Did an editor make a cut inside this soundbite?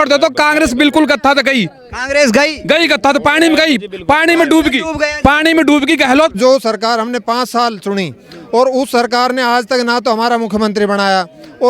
yes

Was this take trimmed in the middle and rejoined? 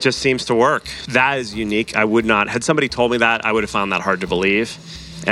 yes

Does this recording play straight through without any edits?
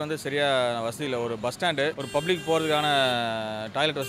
no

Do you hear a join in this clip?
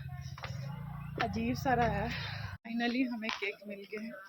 yes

